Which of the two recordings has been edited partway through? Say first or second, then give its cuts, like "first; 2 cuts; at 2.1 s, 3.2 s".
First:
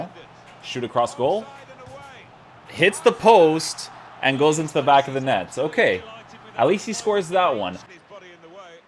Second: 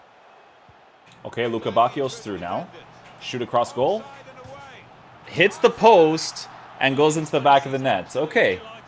first; 1 cut; at 7.8 s